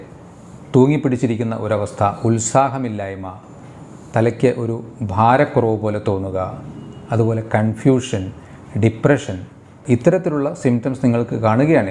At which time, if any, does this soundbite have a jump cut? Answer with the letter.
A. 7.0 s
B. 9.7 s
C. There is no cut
B